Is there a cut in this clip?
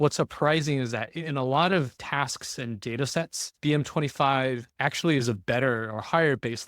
yes; 3 cuts; at 2.0 s, 3.4 s, 4.7 s

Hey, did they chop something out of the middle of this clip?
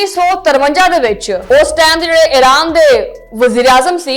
yes; 1 cut; at 1.3 s

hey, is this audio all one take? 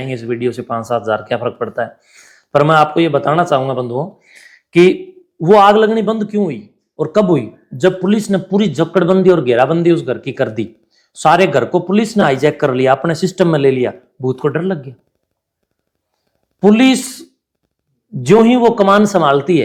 yes; 0 cuts

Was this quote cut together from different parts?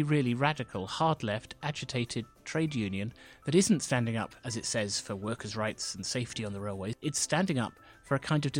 yes; 1 cut; at 7.0 s

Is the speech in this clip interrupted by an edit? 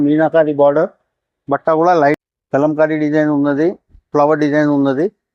yes; 1 cut; at 2.2 s

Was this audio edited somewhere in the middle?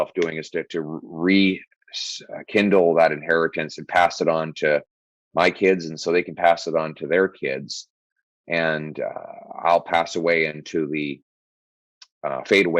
no; 0 cuts

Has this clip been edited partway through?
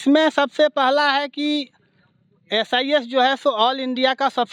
no; 0 cuts

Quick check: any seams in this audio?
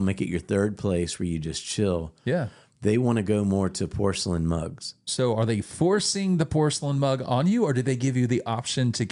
no; 0 cuts

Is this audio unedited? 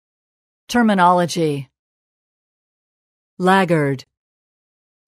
yes; 0 cuts

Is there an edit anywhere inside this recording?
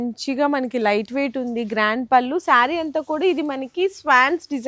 no; 0 cuts

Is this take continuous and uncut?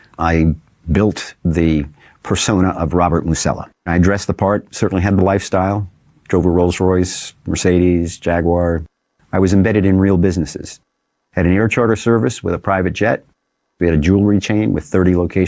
yes; 0 cuts

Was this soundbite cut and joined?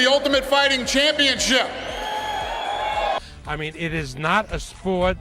no; 0 cuts

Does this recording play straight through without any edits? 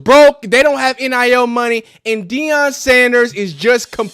yes; 0 cuts

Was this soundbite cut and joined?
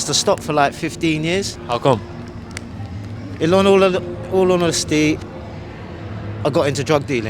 yes; 1 cut; at 1.6 s

